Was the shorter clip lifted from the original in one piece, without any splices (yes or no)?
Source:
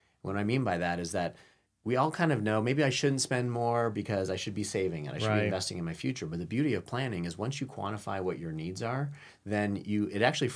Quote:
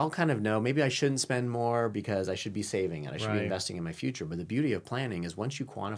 yes